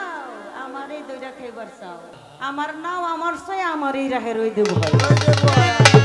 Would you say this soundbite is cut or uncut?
cut